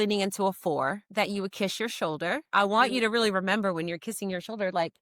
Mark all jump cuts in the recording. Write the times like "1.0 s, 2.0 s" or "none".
1.0 s, 2.5 s